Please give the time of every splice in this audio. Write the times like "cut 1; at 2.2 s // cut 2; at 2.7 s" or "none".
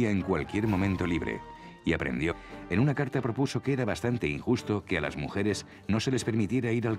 none